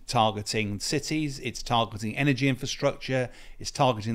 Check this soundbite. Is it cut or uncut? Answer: uncut